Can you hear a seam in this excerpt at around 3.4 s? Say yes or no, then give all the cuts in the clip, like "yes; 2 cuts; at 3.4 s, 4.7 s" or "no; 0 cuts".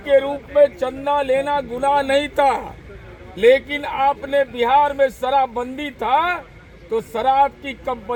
no; 0 cuts